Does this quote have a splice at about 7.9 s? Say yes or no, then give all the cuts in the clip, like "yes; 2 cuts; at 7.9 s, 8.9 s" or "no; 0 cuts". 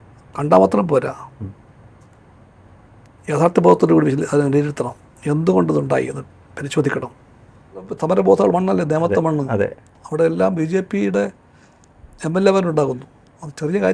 yes; 1 cut; at 7.9 s